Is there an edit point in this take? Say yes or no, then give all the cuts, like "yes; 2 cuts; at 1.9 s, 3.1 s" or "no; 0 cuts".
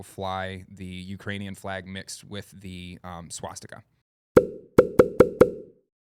no; 0 cuts